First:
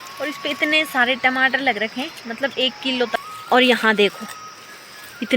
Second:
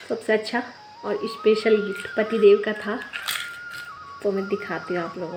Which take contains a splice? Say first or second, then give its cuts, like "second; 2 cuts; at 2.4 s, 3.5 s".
first; 1 cut; at 3.3 s